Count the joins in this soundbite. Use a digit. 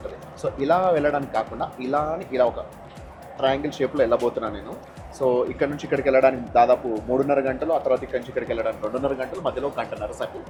0